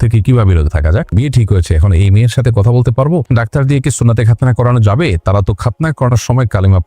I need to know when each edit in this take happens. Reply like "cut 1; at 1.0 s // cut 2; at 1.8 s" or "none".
cut 1; at 1.1 s // cut 2; at 3.3 s